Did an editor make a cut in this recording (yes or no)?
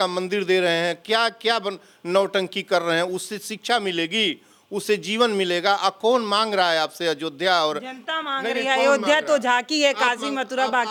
no